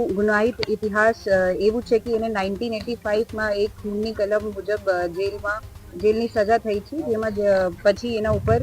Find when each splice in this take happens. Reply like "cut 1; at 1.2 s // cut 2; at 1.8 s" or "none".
none